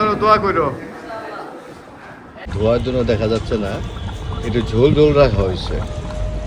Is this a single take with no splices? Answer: no; 1 cut; at 2.5 s

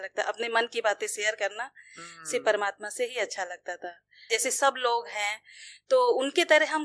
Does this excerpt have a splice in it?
yes; 1 cut; at 4.2 s

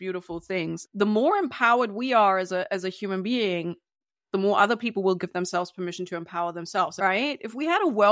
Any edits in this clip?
yes; 2 cuts; at 0.8 s, 6.9 s

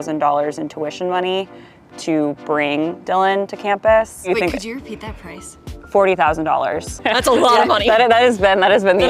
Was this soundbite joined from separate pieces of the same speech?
yes; 1 cut; at 7.0 s

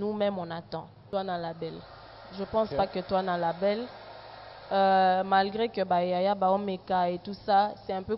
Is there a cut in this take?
yes; 1 cut; at 1.1 s

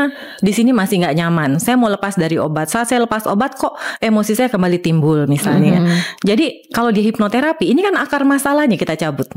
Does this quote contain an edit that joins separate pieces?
no; 0 cuts

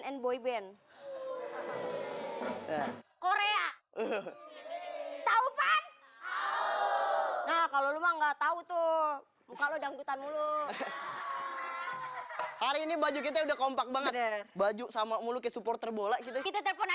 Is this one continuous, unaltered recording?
yes; 0 cuts

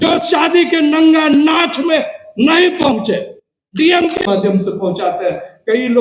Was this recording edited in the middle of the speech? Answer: yes; 1 cut; at 4.2 s

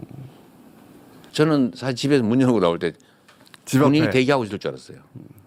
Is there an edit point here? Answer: yes; 1 cut; at 1.2 s

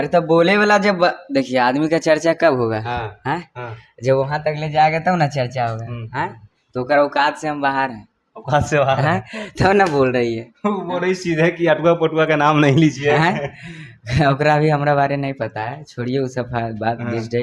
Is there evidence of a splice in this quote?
no; 0 cuts

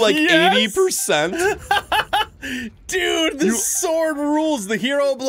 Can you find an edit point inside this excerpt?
no; 0 cuts

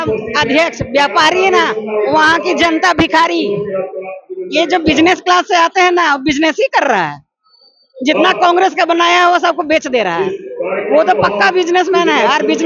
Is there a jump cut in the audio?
no; 0 cuts

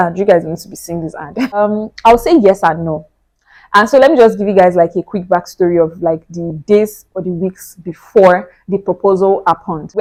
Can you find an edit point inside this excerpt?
no; 0 cuts

